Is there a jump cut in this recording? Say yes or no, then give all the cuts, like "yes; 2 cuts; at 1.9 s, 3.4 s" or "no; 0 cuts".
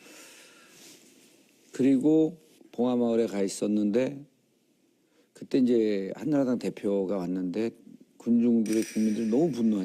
yes; 1 cut; at 8.2 s